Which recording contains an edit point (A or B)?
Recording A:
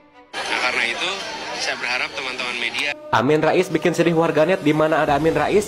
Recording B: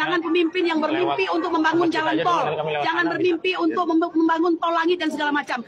A